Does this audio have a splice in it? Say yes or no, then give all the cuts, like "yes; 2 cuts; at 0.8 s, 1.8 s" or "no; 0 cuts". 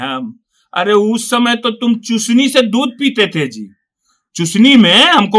no; 0 cuts